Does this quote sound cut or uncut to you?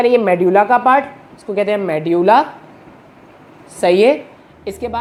uncut